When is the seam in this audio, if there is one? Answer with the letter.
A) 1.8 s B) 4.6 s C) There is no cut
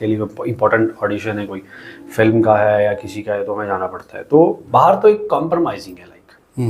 B